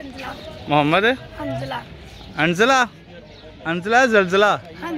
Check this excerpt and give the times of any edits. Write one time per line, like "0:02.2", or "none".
none